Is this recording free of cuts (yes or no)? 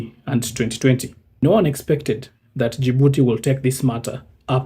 no